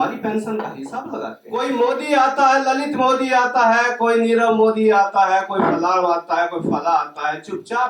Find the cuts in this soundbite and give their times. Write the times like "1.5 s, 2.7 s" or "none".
1.4 s